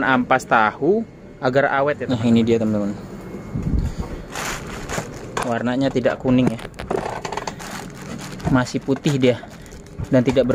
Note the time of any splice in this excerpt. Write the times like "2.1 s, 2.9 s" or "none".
2.1 s